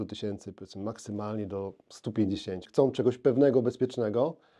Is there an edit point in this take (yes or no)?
yes